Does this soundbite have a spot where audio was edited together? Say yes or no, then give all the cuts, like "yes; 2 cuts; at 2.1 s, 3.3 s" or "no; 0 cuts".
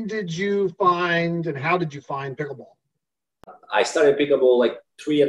yes; 1 cut; at 3.6 s